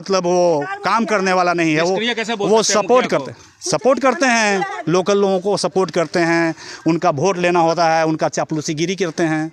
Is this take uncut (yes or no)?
yes